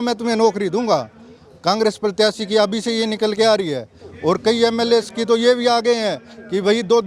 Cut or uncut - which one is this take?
uncut